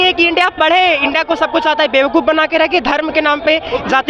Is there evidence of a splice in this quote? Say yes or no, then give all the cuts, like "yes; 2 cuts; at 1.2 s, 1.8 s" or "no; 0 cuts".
no; 0 cuts